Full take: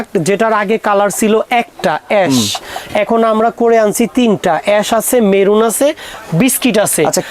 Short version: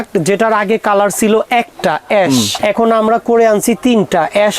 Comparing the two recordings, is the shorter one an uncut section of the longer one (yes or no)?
no